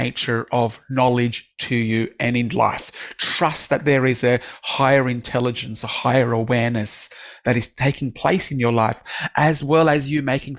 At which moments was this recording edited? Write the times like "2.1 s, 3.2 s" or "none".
none